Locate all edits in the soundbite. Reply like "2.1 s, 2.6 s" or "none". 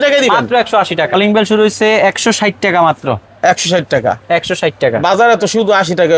1.1 s